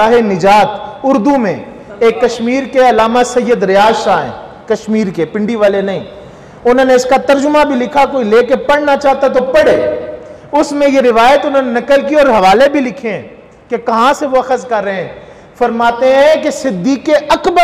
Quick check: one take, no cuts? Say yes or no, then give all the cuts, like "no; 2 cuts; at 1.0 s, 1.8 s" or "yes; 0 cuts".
yes; 0 cuts